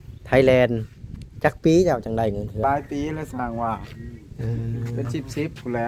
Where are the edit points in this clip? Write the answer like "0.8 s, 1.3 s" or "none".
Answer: 2.6 s